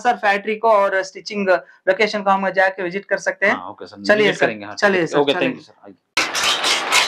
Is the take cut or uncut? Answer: uncut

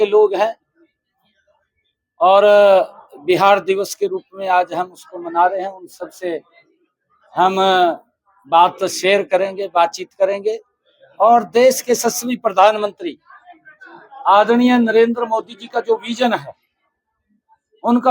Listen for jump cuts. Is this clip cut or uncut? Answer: uncut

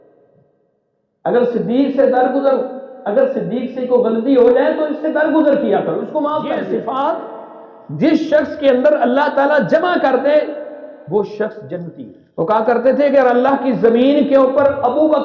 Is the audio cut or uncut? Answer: cut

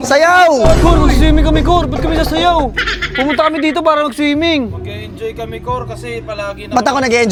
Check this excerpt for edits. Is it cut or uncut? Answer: uncut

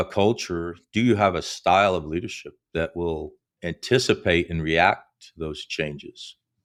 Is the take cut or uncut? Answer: uncut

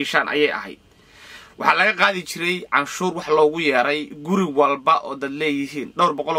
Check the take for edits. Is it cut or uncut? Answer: uncut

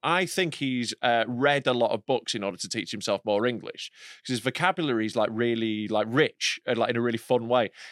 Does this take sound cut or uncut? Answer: uncut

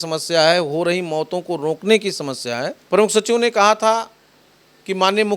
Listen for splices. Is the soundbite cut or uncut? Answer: cut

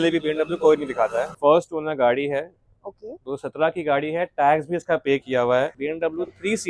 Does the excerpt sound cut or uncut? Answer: cut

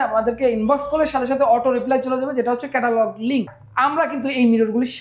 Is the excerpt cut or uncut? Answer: cut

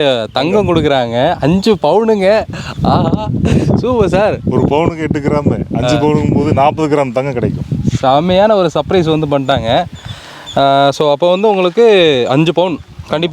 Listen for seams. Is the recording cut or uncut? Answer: uncut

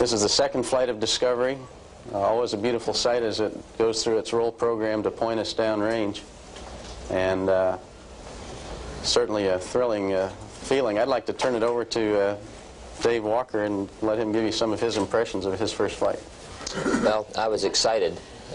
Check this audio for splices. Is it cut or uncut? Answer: uncut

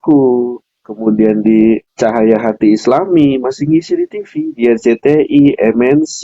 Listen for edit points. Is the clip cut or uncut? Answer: cut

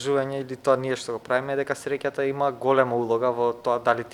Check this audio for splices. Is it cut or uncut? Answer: uncut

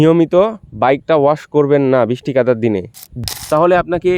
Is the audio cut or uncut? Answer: cut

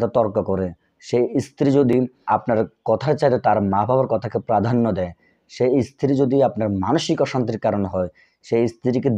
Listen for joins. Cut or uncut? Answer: cut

